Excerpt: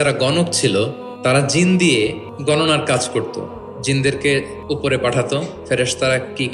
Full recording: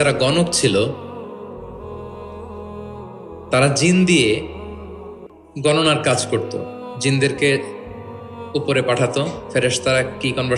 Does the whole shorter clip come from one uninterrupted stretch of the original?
no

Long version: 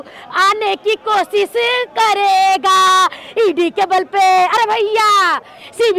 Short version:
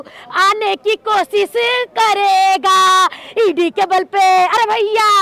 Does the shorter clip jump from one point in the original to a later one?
no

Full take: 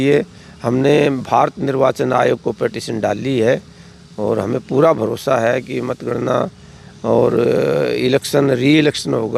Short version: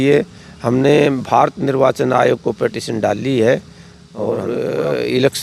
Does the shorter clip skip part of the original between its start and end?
yes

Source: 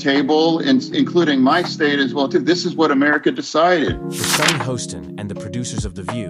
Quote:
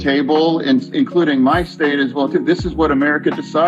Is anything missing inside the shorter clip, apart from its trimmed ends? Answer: no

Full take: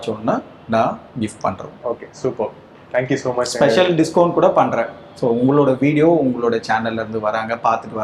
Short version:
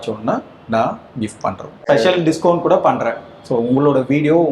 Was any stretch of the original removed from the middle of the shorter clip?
yes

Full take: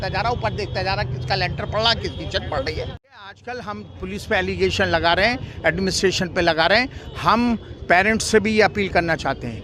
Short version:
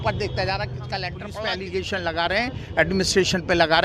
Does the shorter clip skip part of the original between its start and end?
yes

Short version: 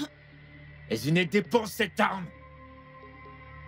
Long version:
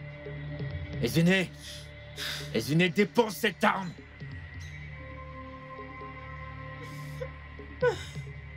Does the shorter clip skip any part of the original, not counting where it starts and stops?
yes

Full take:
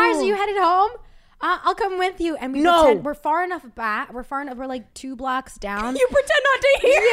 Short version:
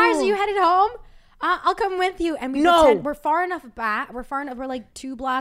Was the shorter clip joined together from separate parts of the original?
no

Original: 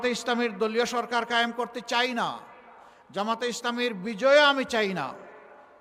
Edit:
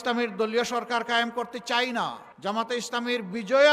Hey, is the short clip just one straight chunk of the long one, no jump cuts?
no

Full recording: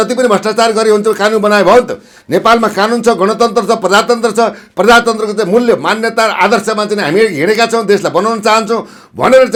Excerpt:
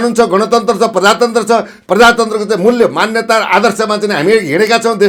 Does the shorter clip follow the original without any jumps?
yes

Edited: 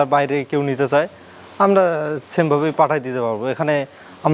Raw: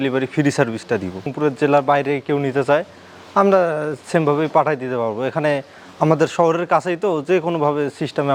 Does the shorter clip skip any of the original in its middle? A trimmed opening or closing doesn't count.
no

